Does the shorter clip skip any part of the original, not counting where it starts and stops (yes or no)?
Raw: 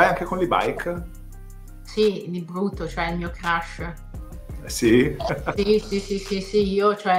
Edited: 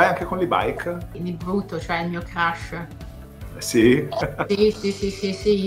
yes